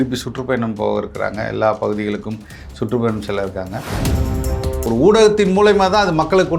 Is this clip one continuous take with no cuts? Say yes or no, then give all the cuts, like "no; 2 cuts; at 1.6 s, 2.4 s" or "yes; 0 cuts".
no; 1 cut; at 4.3 s